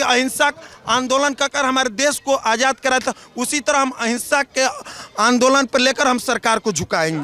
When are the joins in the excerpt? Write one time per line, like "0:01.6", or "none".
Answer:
none